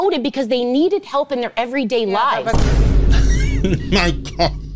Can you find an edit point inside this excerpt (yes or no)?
no